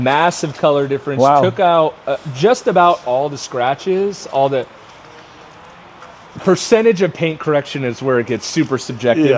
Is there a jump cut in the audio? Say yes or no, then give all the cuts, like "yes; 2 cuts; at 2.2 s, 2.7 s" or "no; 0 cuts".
no; 0 cuts